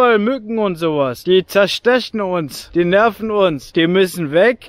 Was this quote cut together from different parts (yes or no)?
yes